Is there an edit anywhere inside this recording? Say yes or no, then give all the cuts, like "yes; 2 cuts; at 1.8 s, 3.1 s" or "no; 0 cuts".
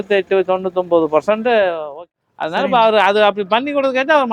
yes; 1 cut; at 2.1 s